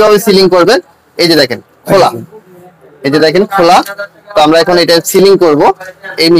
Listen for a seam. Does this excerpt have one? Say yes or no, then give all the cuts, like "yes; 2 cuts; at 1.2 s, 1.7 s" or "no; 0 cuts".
no; 0 cuts